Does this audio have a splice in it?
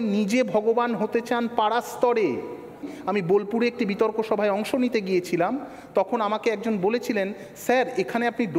yes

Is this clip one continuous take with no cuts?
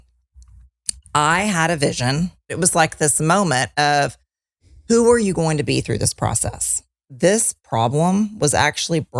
no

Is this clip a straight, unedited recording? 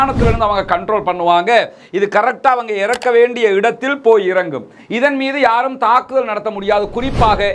yes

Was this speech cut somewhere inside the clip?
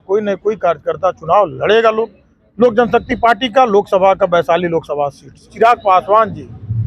yes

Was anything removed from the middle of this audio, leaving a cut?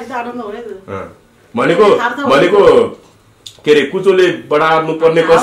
no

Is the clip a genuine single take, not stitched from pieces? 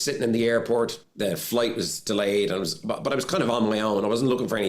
no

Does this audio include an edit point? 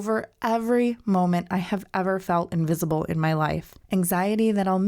yes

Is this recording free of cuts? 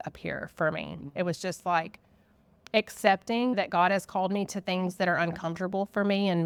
yes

